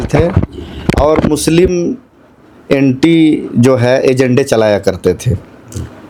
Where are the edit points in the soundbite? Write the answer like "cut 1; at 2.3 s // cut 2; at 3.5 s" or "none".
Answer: none

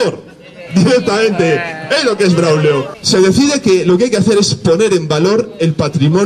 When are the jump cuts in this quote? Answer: cut 1; at 2.9 s

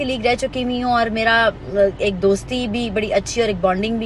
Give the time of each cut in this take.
none

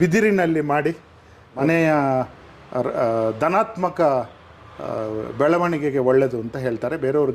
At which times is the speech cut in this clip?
cut 1; at 1.6 s

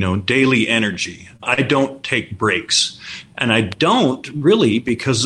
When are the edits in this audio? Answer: cut 1; at 1.4 s

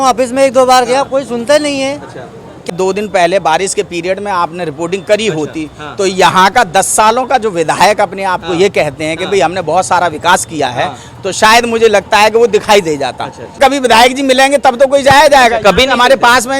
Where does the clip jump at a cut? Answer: cut 1; at 2.7 s // cut 2; at 13.6 s

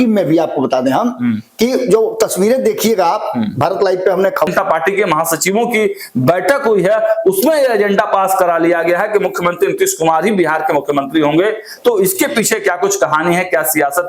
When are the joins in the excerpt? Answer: cut 1; at 4.5 s

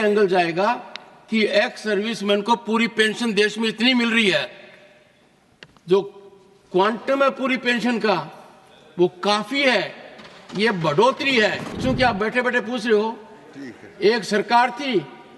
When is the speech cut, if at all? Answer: cut 1; at 11.8 s

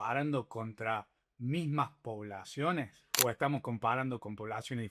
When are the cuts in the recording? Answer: cut 1; at 3.0 s

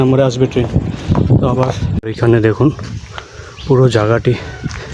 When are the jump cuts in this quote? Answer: cut 1; at 2.0 s

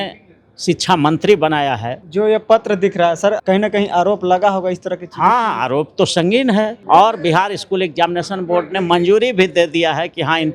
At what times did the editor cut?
cut 1; at 2.0 s // cut 2; at 3.4 s // cut 3; at 6.8 s

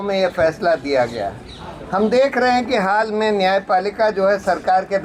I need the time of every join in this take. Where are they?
none

